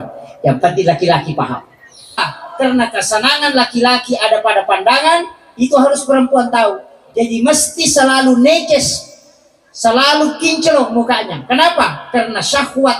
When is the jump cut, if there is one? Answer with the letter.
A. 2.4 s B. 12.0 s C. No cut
A